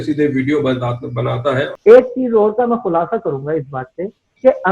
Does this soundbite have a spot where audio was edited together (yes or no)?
yes